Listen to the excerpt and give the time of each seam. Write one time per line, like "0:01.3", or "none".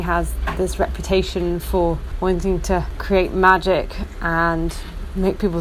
0:02.1
0:03.0

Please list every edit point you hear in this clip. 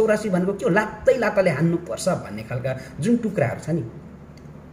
none

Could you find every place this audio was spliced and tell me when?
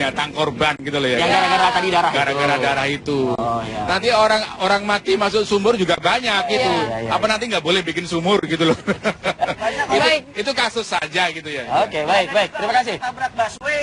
none

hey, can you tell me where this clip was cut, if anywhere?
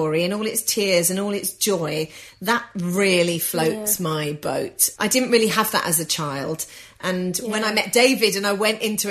0:04.8
0:07.0

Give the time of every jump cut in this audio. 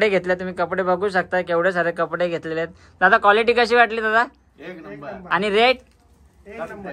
none

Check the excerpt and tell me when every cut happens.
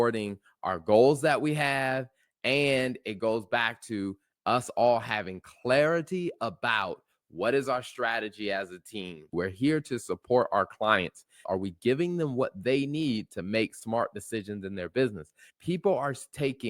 0:09.3
0:11.3
0:15.4

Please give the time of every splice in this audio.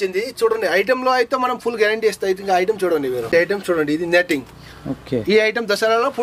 0:03.3

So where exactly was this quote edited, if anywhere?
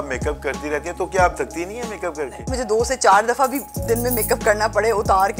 0:02.5

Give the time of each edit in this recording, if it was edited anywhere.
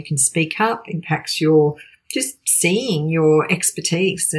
none

